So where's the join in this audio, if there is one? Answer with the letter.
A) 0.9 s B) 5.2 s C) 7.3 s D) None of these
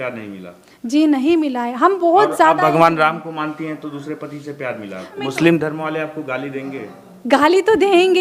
B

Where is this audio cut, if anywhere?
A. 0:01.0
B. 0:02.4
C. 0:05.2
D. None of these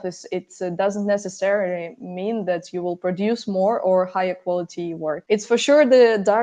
C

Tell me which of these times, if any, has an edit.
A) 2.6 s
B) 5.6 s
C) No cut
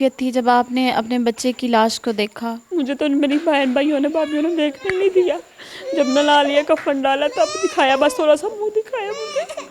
A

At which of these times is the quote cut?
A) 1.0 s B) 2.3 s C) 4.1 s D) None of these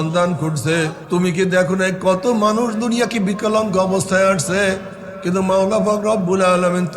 A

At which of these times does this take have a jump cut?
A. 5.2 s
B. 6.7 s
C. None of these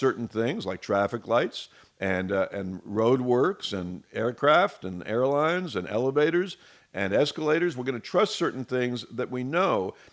C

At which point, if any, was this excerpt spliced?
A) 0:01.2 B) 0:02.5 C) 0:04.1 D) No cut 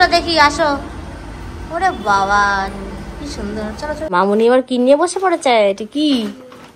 C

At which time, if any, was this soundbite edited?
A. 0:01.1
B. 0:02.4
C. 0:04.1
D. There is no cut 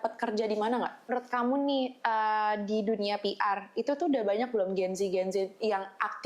A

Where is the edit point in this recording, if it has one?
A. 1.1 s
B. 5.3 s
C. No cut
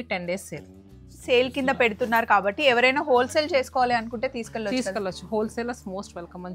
A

